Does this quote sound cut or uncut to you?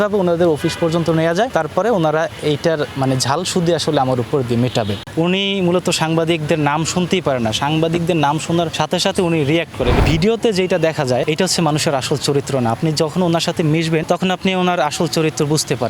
cut